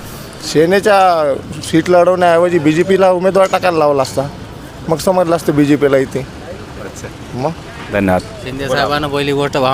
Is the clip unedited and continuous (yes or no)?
yes